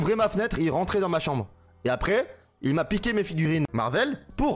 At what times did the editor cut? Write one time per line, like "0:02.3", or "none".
0:03.4